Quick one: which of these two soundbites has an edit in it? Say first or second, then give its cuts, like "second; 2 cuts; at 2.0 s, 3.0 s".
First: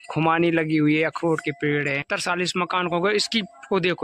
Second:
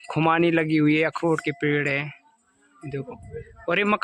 first; 1 cut; at 2.0 s